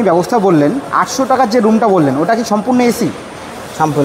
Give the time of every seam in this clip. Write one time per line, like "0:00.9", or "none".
none